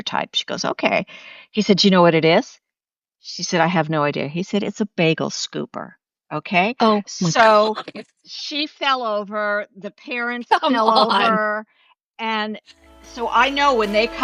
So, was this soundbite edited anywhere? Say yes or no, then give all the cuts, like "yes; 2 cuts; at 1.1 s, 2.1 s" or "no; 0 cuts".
no; 0 cuts